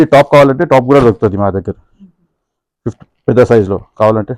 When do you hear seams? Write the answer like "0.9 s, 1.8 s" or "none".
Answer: none